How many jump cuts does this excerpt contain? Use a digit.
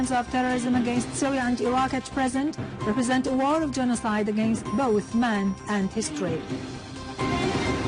0